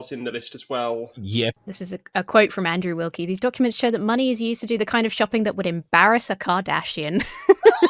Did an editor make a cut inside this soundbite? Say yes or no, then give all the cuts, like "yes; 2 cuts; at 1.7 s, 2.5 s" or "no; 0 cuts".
yes; 1 cut; at 1.6 s